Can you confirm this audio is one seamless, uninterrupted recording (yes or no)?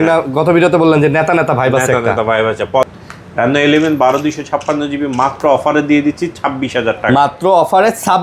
no